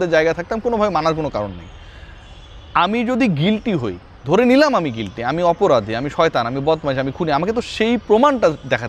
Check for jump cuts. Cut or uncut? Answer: uncut